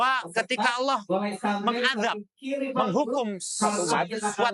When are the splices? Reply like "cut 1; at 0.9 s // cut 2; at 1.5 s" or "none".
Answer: none